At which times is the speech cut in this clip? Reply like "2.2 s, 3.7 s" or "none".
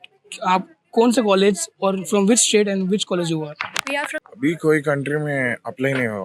4.2 s